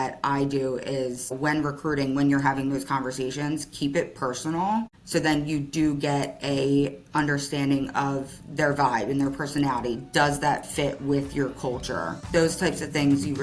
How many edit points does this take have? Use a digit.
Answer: 3